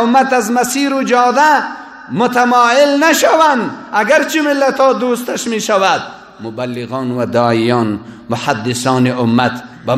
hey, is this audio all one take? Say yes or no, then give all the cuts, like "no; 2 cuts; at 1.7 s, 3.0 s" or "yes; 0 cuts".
yes; 0 cuts